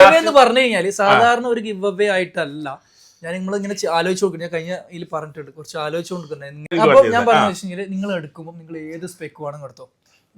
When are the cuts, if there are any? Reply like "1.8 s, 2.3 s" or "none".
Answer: 6.7 s